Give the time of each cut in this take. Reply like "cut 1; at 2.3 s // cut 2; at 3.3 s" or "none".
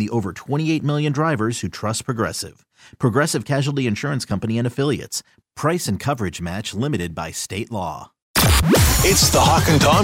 cut 1; at 8.2 s